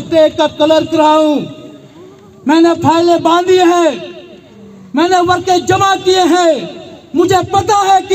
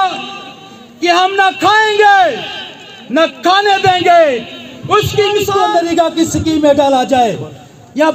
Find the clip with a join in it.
second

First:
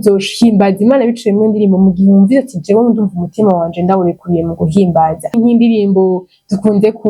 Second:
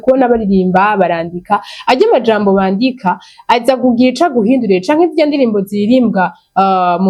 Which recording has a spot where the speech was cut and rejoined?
first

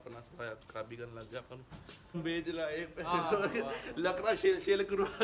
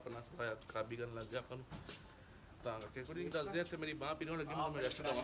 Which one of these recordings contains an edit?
first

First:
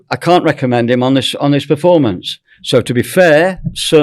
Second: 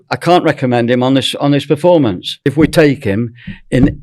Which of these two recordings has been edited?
second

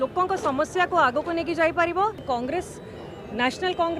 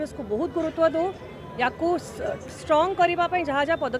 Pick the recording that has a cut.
first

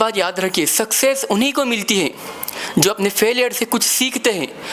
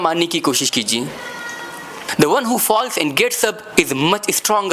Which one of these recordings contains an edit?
second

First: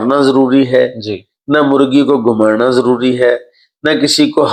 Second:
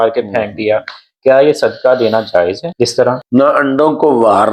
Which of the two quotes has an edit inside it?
second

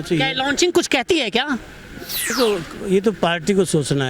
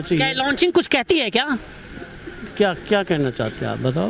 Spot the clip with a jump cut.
first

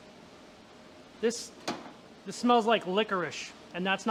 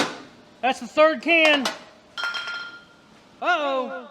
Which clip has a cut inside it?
second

